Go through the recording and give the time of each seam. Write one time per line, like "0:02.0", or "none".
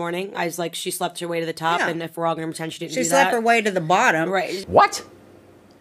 0:04.6